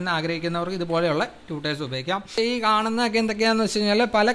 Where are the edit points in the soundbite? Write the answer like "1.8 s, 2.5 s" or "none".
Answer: 2.3 s